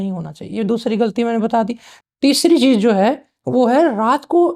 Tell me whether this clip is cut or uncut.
uncut